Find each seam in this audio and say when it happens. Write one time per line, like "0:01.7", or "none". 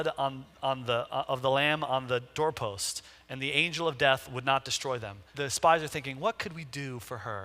0:05.3